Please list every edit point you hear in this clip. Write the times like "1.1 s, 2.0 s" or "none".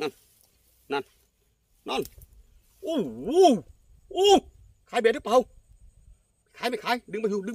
none